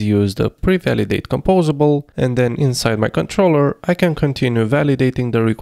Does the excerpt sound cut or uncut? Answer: cut